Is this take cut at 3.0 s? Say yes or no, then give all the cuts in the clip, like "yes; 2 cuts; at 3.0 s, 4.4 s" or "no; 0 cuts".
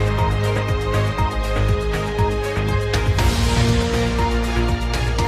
yes; 1 cut; at 3.0 s